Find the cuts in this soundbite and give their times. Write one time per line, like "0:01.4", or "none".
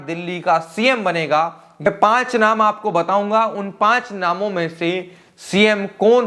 0:01.9